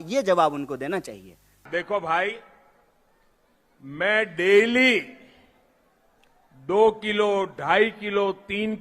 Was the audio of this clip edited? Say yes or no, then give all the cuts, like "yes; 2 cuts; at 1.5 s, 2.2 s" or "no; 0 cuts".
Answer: yes; 1 cut; at 1.7 s